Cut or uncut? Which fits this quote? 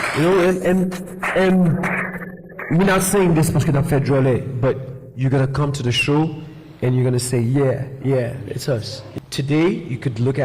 cut